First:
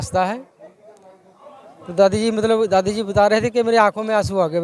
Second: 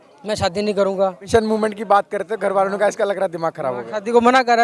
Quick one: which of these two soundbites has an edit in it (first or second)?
second